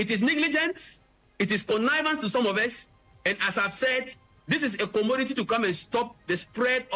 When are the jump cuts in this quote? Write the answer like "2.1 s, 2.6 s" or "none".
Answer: none